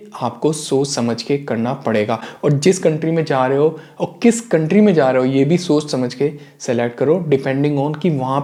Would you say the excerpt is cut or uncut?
uncut